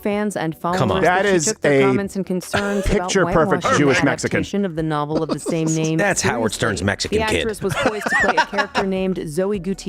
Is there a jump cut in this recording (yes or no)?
no